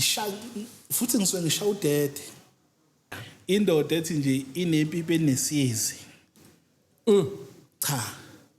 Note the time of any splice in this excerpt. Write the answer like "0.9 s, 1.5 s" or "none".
3.3 s